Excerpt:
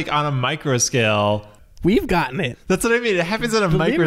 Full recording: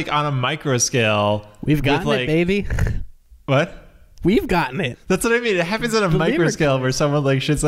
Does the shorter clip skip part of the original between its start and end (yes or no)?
yes